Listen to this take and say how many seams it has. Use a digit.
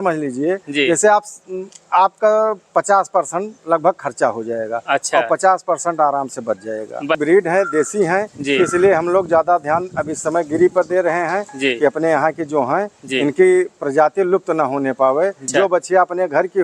2